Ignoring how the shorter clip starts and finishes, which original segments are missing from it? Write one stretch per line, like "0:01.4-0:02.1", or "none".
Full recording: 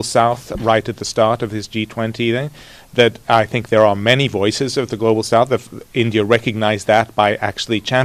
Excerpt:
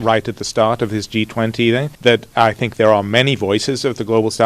0:02.5-0:02.8